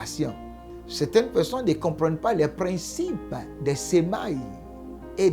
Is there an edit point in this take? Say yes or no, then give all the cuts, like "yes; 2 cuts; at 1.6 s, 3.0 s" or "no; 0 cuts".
yes; 1 cut; at 0.9 s